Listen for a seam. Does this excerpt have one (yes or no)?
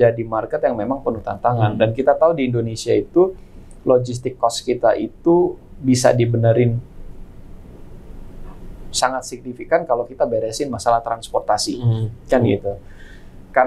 no